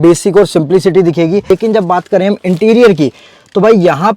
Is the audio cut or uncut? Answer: cut